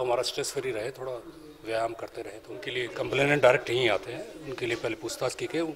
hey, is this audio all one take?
no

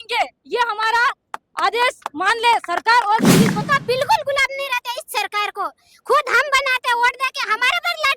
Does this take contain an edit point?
yes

